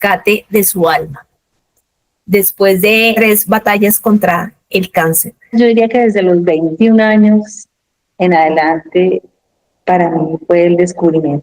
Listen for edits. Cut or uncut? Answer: cut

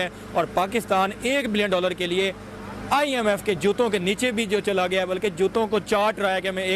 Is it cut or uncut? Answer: uncut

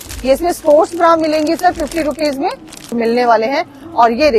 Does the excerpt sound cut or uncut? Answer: cut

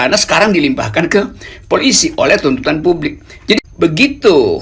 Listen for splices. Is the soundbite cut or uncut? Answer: cut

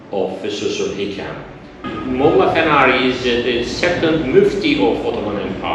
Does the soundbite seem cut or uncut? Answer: cut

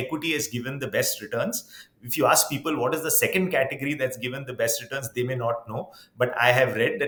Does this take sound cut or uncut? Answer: uncut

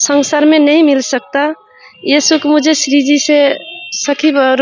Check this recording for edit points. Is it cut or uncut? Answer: uncut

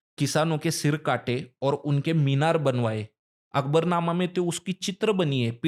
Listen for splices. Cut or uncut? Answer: uncut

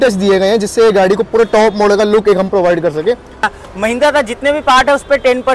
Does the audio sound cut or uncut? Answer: cut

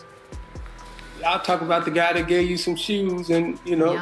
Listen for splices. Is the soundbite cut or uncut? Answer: cut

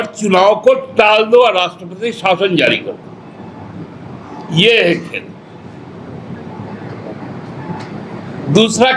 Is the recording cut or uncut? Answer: uncut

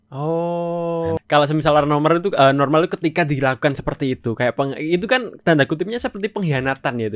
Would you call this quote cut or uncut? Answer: cut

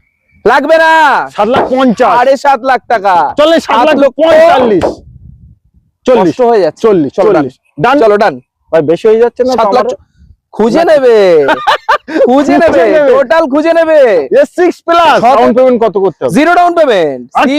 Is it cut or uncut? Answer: cut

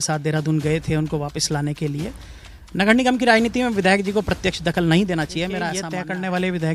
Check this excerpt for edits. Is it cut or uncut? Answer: cut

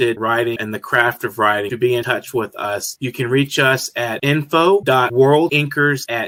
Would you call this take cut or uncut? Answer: uncut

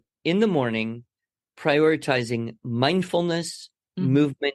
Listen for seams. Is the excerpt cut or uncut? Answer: uncut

